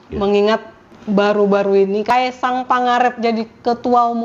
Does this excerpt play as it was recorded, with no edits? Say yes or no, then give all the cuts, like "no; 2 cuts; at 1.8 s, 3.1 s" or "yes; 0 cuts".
no; 1 cut; at 2.0 s